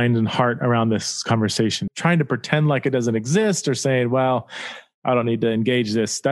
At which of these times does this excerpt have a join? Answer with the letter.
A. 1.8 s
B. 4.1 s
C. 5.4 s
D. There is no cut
A